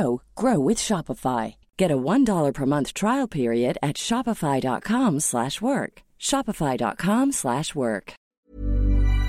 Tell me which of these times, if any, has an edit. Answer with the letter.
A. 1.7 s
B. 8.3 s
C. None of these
B